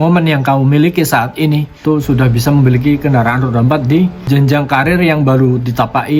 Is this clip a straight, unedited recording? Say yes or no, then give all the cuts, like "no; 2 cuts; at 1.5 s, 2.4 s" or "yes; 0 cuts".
no; 2 cuts; at 1.7 s, 4.2 s